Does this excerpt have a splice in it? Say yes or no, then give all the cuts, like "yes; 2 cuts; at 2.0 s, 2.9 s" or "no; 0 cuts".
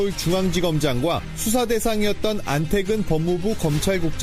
no; 0 cuts